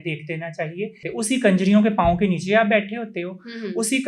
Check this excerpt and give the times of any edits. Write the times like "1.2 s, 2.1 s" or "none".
1.1 s